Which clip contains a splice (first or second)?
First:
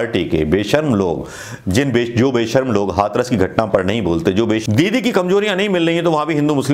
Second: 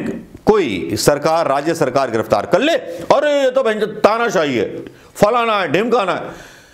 first